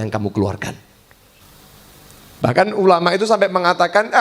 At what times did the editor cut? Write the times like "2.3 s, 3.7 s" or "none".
1.4 s